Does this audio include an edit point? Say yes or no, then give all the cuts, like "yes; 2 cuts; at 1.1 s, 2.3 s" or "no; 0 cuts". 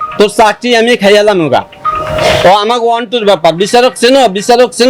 no; 0 cuts